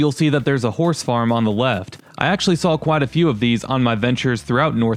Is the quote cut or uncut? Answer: uncut